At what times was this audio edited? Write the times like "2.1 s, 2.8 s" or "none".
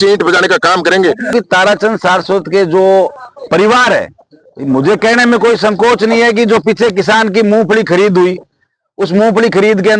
1.3 s